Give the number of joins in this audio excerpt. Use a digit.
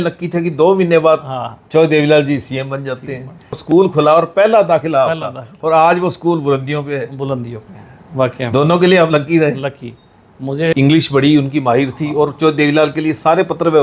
2